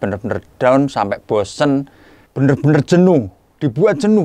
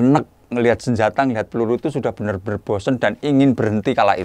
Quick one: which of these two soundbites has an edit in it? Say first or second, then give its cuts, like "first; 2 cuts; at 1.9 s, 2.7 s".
first; 1 cut; at 1.9 s